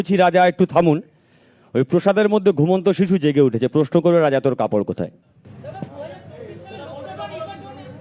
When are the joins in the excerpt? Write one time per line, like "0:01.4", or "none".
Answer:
none

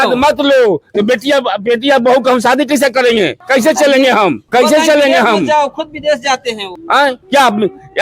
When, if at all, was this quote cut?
0:03.4
0:04.4
0:06.9

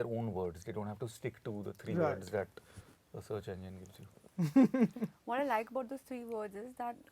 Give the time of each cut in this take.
none

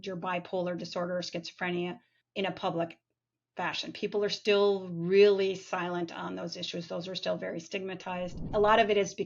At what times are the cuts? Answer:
0:02.2
0:08.4

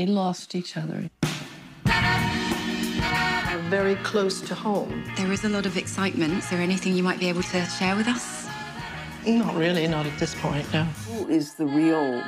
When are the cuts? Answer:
0:03.5
0:11.2

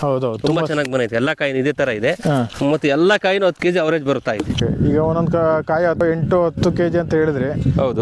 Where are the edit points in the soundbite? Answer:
0:04.6
0:06.0

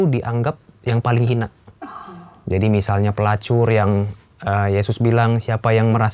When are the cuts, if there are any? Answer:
none

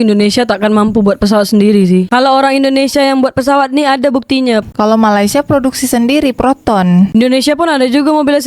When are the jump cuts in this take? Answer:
0:04.6

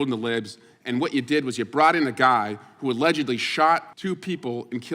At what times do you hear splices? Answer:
0:03.9

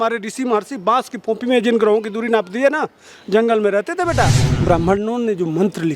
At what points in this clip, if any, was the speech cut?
0:04.5

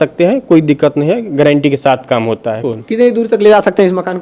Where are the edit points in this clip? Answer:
0:02.6

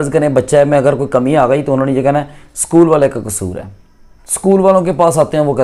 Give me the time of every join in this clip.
none

